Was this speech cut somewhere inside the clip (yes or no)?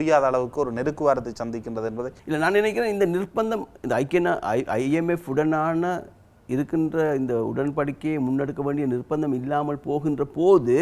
yes